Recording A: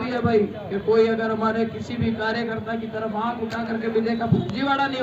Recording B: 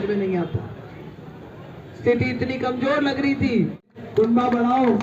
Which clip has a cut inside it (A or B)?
B